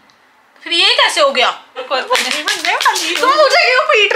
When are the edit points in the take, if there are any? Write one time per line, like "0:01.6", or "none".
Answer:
0:01.8